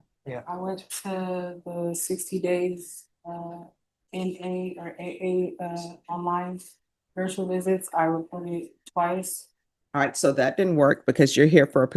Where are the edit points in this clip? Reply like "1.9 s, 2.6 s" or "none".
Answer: none